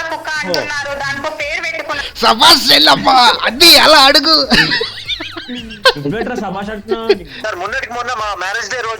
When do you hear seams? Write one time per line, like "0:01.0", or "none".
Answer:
0:07.4